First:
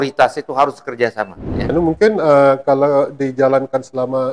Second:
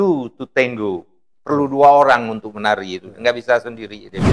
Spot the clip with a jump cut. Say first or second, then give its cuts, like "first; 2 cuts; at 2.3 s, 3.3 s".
first; 1 cut; at 1.7 s